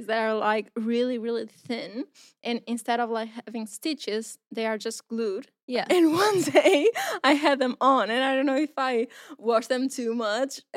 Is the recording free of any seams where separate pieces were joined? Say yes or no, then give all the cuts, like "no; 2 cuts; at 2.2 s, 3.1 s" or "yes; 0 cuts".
no; 1 cut; at 5.8 s